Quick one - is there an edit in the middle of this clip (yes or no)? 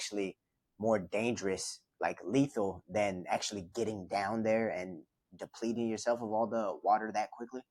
no